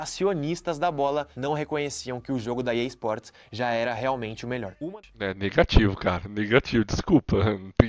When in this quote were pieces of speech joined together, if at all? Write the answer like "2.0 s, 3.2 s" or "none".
4.8 s